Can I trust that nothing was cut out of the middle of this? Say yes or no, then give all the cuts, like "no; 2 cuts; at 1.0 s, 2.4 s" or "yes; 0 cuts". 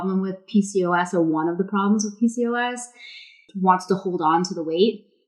no; 1 cut; at 3.5 s